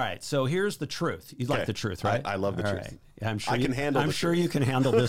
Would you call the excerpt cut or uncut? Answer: uncut